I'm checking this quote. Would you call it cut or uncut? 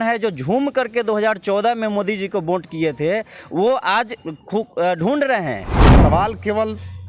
cut